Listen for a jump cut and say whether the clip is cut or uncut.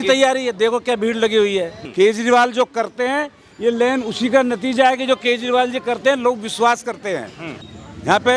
cut